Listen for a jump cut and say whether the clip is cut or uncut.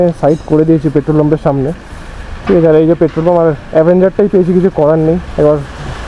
uncut